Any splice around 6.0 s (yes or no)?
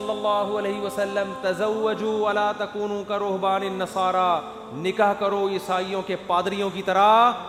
no